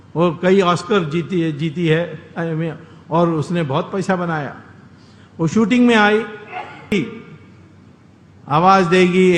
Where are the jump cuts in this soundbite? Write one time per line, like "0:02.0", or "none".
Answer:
0:06.9